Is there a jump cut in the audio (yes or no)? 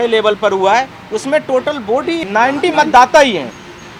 no